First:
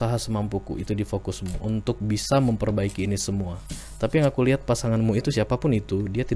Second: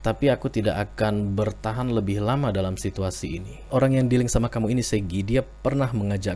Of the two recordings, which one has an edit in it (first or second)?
second